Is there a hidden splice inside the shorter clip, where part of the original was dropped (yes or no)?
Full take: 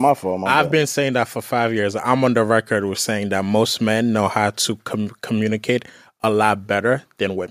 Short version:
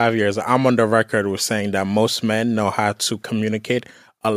yes